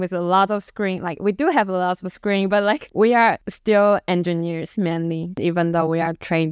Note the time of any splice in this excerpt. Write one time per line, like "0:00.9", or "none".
0:03.0
0:05.4